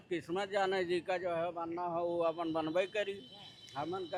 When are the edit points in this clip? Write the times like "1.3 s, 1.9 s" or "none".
none